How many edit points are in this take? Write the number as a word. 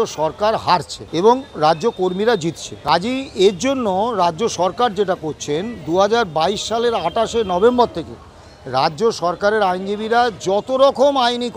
two